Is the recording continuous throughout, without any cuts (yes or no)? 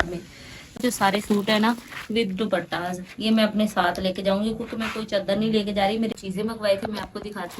no